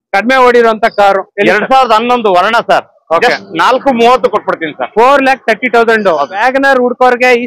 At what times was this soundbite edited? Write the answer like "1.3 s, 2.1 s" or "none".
6.4 s